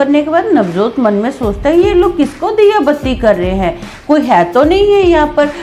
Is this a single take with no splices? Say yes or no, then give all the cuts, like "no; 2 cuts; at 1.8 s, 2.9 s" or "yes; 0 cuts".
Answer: yes; 0 cuts